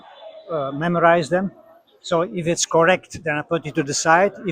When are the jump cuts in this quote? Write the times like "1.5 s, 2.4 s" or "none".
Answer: none